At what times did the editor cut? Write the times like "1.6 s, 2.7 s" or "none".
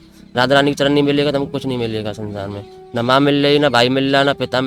none